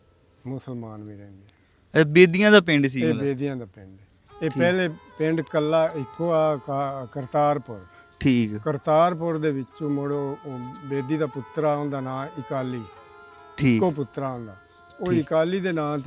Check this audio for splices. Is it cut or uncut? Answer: uncut